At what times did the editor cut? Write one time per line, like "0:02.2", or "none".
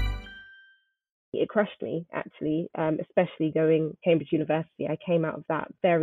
0:01.2
0:04.0